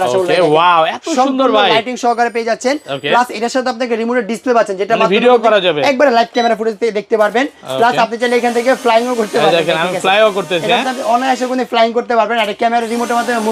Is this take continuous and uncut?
yes; 0 cuts

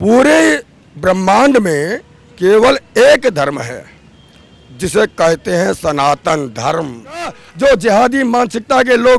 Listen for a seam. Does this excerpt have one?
yes; 1 cut; at 7.4 s

